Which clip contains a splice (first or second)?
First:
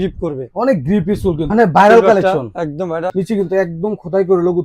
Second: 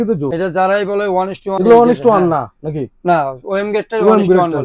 first